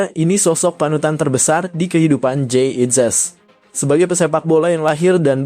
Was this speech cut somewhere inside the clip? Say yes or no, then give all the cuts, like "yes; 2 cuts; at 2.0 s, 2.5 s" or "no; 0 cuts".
no; 0 cuts